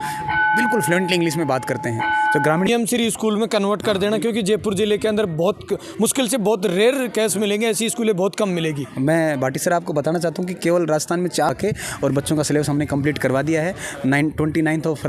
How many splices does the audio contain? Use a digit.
2